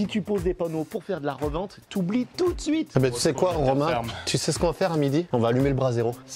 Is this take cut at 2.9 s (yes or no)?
yes